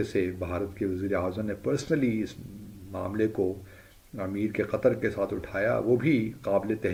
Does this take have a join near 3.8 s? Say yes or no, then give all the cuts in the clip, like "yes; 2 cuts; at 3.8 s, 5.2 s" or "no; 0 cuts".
no; 0 cuts